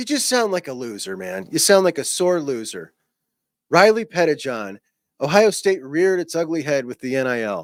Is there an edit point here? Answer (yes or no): no